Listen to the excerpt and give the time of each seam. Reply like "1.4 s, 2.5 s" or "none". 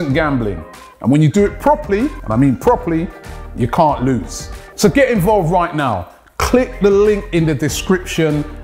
4.4 s